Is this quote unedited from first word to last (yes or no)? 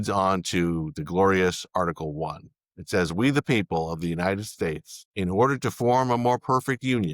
no